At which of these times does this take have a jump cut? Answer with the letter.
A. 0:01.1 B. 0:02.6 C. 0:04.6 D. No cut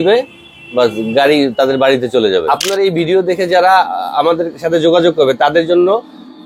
B